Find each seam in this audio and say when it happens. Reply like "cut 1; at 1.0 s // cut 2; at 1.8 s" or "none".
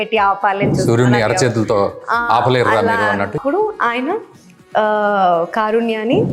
cut 1; at 3.4 s